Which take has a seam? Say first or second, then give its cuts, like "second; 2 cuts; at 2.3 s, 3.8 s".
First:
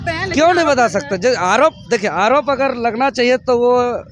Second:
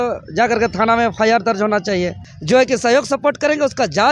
second; 1 cut; at 2.3 s